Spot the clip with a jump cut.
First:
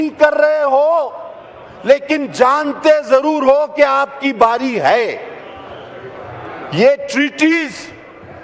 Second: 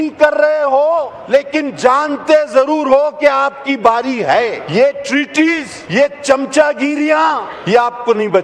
second; 4 cuts; at 1.2 s, 4.6 s, 5.7 s, 7.5 s

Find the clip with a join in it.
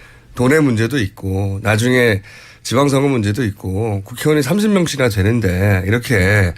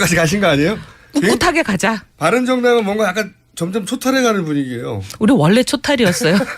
first; 1 cut; at 5.2 s

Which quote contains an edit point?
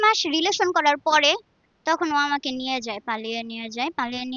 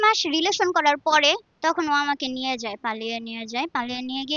second; 1 cut; at 1.5 s

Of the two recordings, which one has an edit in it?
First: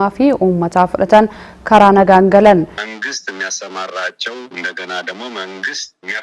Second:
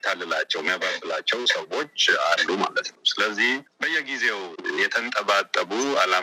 first; 1 cut; at 2.8 s

